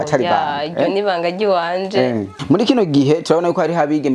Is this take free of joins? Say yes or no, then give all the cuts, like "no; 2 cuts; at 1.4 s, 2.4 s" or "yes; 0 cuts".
no; 1 cut; at 2.3 s